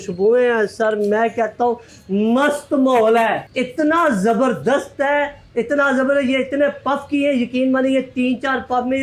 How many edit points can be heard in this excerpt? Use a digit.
0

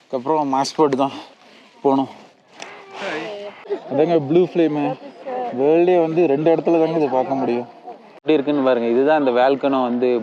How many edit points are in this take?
2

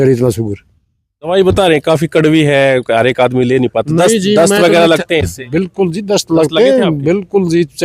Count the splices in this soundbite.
1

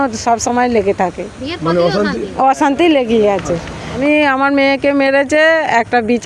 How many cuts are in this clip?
1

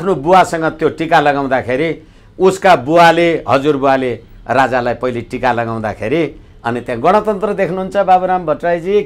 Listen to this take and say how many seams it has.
0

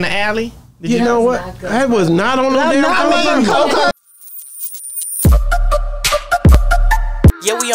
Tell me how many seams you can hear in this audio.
1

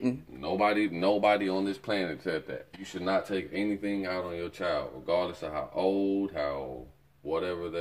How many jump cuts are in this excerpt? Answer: 1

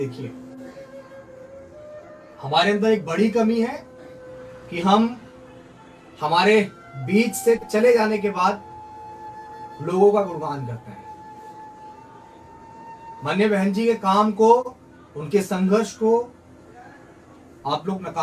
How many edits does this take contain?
0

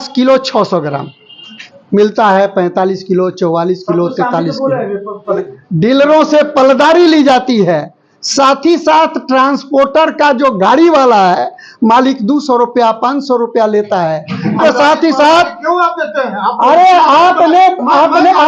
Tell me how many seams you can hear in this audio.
2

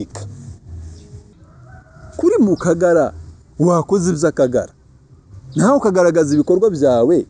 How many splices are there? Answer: 1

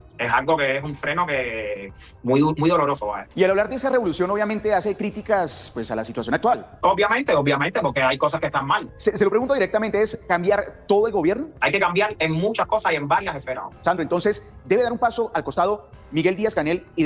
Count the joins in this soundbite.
5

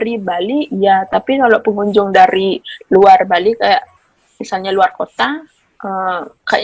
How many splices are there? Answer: 0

